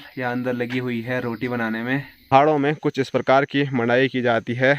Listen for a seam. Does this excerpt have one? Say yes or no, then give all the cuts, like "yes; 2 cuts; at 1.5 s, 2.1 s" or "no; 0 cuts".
yes; 1 cut; at 2.3 s